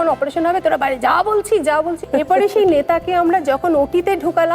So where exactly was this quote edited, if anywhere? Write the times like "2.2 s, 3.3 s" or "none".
2.1 s